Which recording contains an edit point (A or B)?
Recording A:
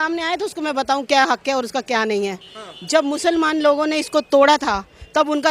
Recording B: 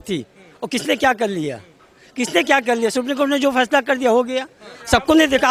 A